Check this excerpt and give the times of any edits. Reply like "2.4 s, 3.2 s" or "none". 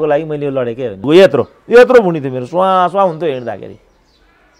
1.0 s